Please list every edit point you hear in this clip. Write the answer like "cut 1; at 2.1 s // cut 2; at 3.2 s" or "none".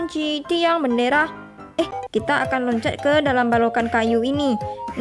cut 1; at 2.0 s